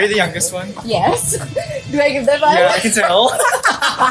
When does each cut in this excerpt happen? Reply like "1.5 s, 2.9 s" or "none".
none

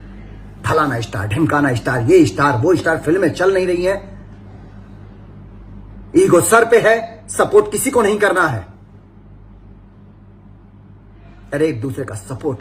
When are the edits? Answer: none

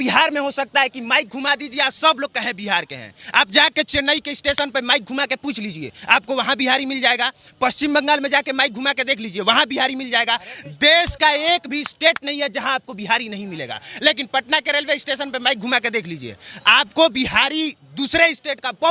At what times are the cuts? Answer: none

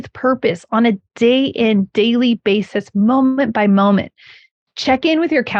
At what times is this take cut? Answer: none

